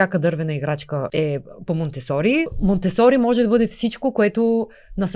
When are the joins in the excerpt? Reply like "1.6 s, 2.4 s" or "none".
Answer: 1.1 s, 2.5 s